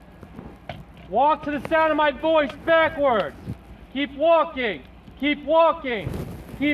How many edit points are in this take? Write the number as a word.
zero